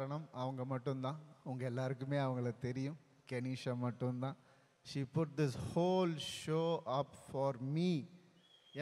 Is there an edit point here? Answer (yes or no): no